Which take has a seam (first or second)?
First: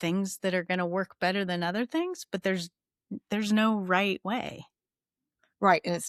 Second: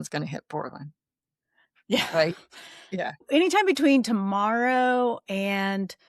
second